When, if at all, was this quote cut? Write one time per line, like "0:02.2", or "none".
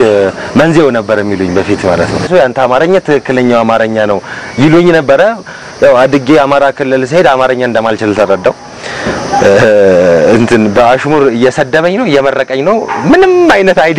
0:02.3